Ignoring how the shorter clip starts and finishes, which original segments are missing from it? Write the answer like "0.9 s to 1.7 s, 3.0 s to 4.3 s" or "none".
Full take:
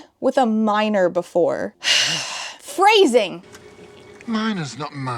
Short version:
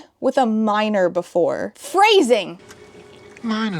1.7 s to 2.6 s